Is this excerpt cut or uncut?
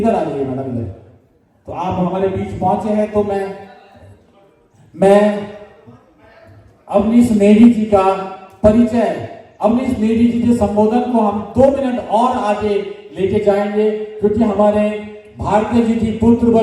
uncut